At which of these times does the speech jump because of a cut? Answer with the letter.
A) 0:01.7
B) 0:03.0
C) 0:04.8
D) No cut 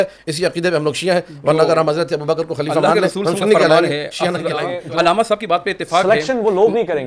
C